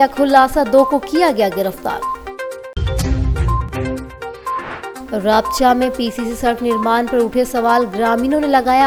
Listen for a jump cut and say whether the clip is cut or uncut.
uncut